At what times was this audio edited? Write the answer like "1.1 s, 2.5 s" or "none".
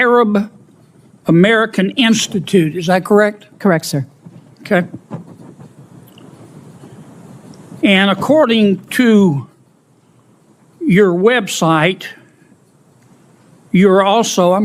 none